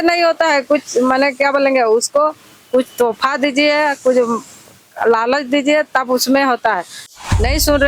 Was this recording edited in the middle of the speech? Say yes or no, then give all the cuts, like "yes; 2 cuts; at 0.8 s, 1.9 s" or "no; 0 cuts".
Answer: yes; 1 cut; at 7.0 s